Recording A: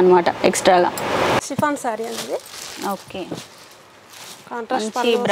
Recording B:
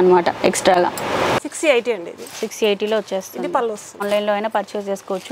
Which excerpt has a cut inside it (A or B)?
B